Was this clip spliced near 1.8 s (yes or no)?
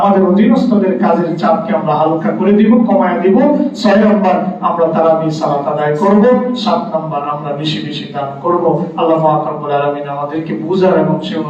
no